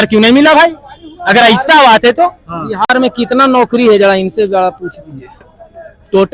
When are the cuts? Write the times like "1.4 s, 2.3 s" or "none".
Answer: none